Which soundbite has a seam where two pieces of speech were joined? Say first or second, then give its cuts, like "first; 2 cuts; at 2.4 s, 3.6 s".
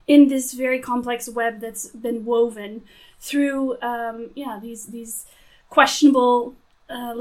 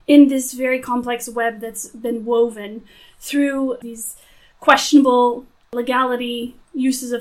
second; 2 cuts; at 3.8 s, 5.6 s